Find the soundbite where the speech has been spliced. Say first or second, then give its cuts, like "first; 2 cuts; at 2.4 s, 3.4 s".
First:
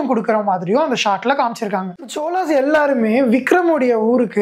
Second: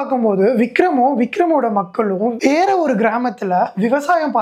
first; 1 cut; at 2.0 s